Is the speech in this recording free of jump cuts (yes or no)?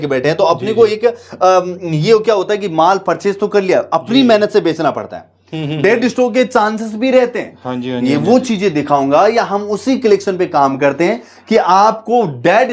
yes